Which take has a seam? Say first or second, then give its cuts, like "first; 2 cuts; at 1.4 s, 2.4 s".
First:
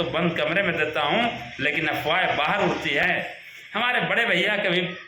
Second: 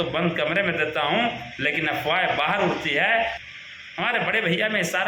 first; 1 cut; at 3.0 s